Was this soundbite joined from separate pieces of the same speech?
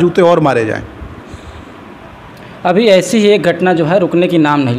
no; 0 cuts

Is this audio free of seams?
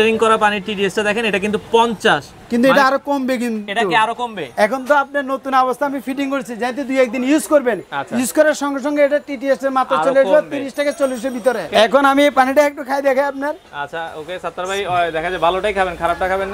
no; 1 cut; at 11.7 s

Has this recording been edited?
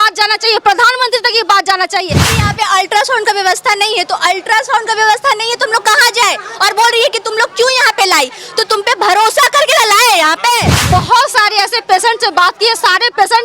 yes; 2 cuts; at 2.3 s, 10.7 s

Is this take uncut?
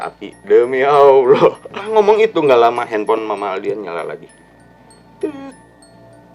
no; 1 cut; at 1.8 s

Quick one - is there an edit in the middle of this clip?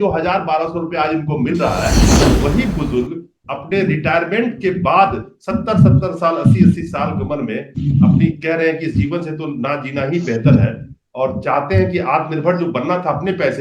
yes; 1 cut; at 2.1 s

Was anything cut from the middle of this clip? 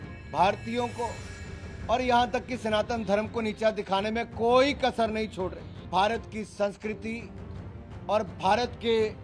yes; 1 cut; at 5.9 s

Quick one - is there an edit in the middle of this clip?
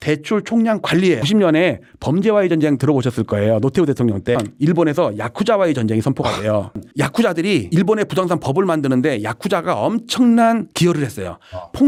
no; 0 cuts

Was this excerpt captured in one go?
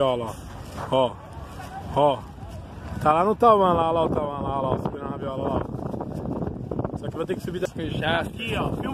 no; 1 cut; at 7.7 s

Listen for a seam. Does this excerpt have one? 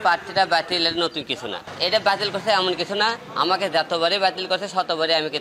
yes; 2 cuts; at 1.7 s, 3.2 s

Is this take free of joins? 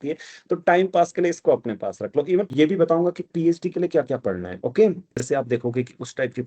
no; 2 cuts; at 2.5 s, 5.2 s

